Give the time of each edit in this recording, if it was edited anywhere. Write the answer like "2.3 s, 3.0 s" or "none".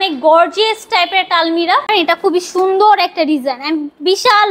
1.9 s